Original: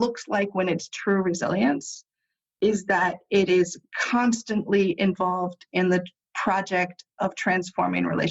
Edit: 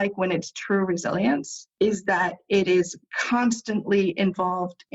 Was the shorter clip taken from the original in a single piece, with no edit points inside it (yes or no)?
no